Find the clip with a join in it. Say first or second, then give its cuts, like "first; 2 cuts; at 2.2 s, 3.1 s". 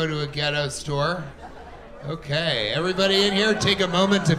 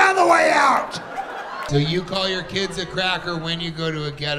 second; 1 cut; at 1.7 s